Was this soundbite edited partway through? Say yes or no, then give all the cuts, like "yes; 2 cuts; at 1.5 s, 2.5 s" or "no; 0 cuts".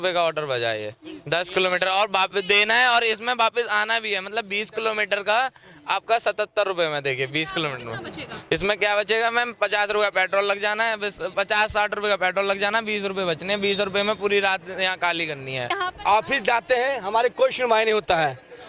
yes; 1 cut; at 15.7 s